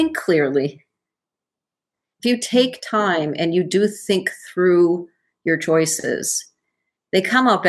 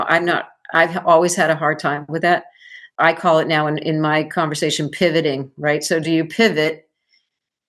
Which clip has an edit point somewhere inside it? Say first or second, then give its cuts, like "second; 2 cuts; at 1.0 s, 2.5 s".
second; 1 cut; at 2.9 s